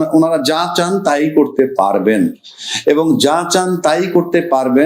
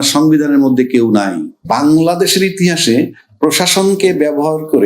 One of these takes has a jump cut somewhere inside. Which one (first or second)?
second